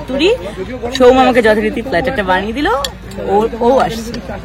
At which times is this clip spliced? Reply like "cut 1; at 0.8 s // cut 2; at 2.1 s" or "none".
none

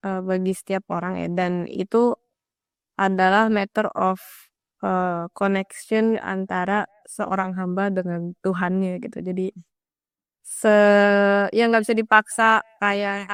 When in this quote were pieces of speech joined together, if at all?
none

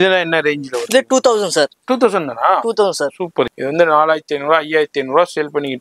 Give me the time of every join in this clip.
cut 1; at 3.6 s

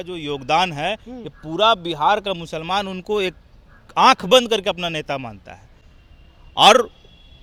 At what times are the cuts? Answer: none

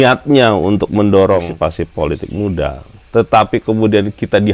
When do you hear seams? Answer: cut 1; at 1.5 s

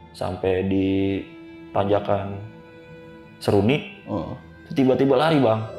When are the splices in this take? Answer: cut 1; at 1.5 s

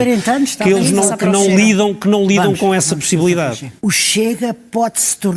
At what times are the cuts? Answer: cut 1; at 3.7 s

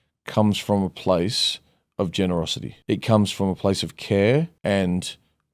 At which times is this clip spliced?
cut 1; at 2.7 s // cut 2; at 4.5 s

